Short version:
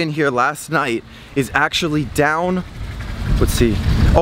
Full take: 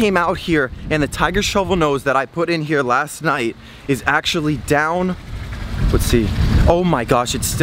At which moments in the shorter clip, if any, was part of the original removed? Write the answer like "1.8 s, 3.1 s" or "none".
none

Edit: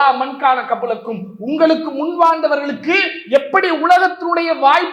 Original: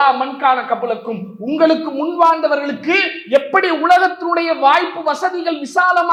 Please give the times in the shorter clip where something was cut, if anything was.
none

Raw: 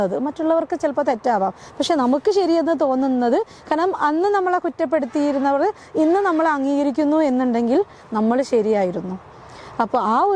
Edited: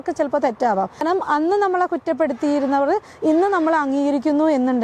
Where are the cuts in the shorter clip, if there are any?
1.0 s

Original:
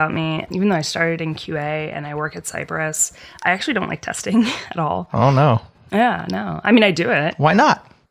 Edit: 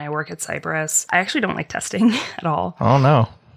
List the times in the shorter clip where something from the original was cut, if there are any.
1.0 s

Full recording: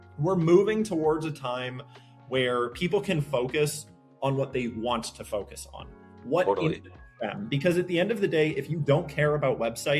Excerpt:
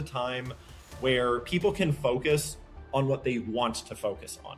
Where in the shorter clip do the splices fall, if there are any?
none

